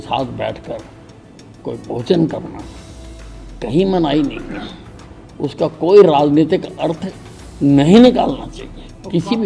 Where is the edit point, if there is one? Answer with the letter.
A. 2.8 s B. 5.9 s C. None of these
C